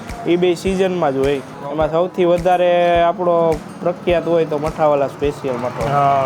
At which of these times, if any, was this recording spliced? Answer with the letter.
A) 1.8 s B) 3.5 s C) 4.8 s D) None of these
A